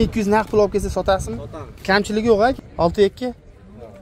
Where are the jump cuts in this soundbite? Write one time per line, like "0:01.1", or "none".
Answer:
0:02.6